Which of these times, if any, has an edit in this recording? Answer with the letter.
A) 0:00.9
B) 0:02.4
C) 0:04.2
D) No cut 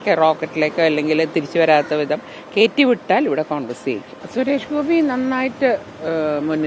C